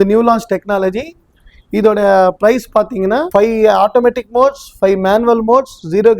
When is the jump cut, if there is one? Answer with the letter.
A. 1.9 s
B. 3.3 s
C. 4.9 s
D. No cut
B